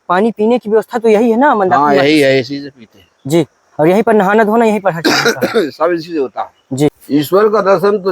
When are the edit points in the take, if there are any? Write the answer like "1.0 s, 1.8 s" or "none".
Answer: 7.0 s